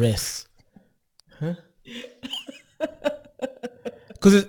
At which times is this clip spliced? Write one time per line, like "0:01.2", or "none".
none